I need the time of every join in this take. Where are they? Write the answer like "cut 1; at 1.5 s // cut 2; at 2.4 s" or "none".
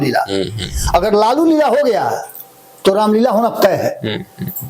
none